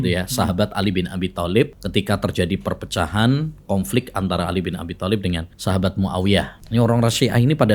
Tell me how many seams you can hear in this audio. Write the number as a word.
three